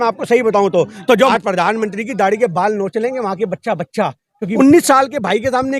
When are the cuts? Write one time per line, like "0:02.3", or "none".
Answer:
0:01.3
0:04.5